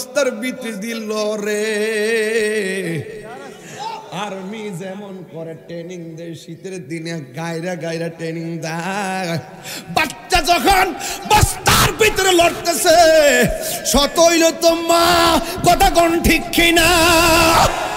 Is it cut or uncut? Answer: uncut